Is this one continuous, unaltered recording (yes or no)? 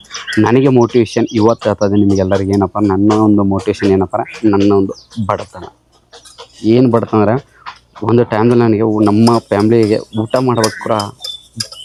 yes